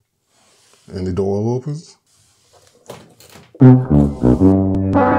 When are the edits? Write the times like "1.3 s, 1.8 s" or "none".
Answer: 3.6 s

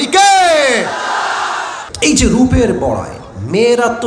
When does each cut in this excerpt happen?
1.7 s

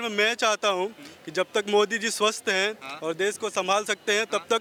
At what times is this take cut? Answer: none

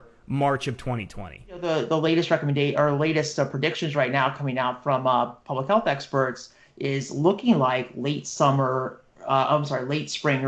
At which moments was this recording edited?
1.6 s

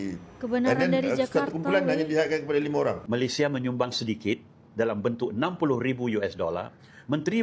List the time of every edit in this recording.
3.0 s

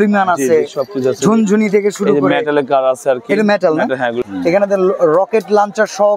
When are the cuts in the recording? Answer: 4.2 s

